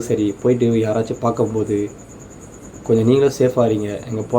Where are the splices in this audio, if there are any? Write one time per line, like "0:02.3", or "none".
none

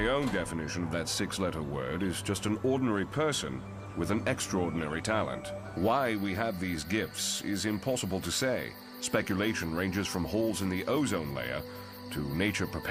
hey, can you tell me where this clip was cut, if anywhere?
none

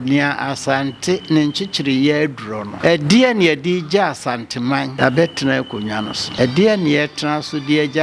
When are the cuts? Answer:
0:02.7
0:04.9
0:06.2

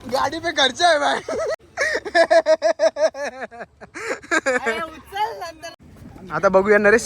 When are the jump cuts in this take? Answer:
0:01.5
0:05.6

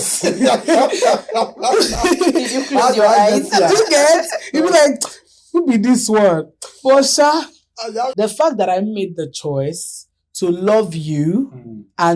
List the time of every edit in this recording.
0:08.1

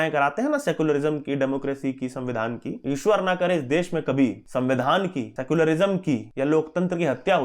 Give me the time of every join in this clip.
0:02.7
0:04.4
0:05.3
0:06.3

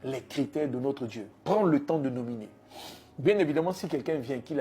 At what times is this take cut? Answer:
0:01.3

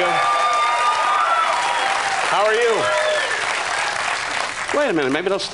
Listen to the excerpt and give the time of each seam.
0:01.4

